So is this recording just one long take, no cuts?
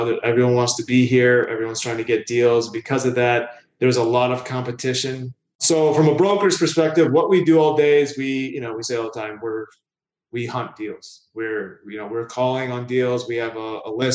no; 1 cut; at 5.6 s

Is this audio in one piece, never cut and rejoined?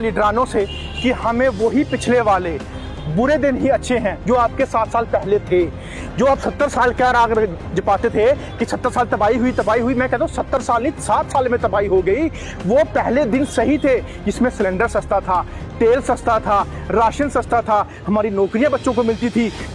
yes; 0 cuts

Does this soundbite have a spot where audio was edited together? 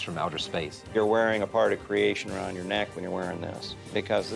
yes; 1 cut; at 0.9 s

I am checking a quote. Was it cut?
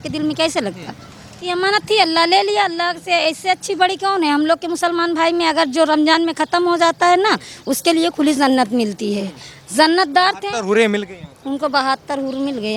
yes; 1 cut; at 1.4 s

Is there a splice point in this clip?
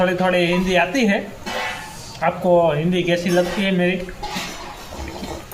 no; 0 cuts

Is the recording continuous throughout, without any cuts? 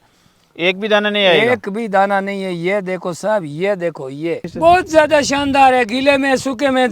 no; 1 cut; at 4.5 s

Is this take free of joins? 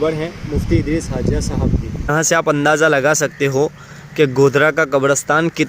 no; 1 cut; at 2.1 s

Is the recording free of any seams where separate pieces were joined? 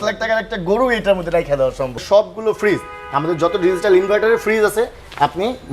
no; 1 cut; at 2.0 s

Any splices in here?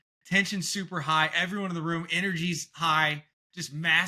no; 0 cuts

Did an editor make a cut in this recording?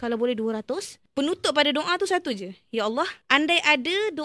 yes; 2 cuts; at 1.0 s, 3.2 s

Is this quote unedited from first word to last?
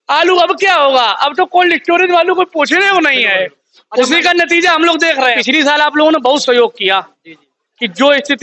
no; 1 cut; at 5.4 s

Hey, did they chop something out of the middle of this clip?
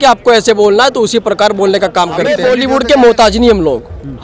yes; 1 cut; at 2.3 s

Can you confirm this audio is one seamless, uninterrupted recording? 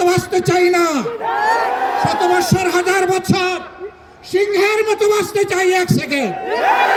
yes; 0 cuts

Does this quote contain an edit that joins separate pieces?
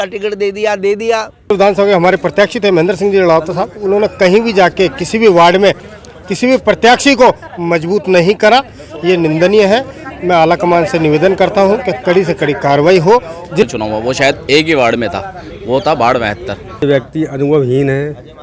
yes; 3 cuts; at 1.5 s, 13.6 s, 16.8 s

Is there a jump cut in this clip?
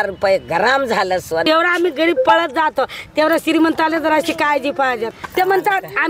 yes; 2 cuts; at 1.4 s, 5.1 s

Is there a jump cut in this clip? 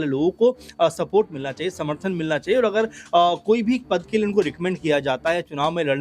no; 0 cuts

